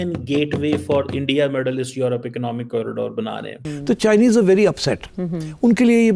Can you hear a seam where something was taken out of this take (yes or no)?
no